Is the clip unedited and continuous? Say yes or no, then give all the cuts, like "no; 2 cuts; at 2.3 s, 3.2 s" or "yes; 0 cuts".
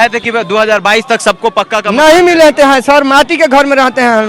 yes; 0 cuts